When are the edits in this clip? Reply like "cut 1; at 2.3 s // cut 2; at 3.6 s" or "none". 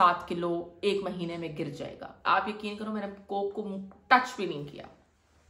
cut 1; at 2.2 s